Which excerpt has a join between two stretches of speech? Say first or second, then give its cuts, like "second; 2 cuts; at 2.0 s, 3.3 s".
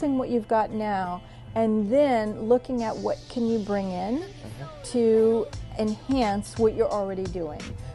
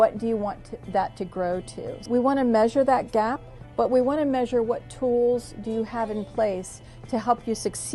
second; 1 cut; at 2.1 s